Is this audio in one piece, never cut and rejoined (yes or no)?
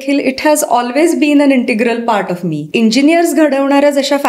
no